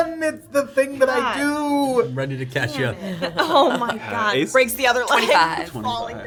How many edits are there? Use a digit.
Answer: 0